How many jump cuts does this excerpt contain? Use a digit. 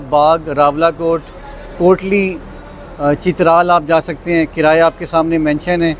0